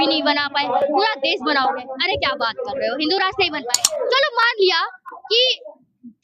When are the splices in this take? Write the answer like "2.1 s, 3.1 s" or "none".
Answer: 3.8 s